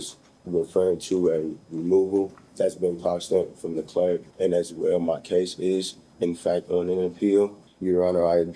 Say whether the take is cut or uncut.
cut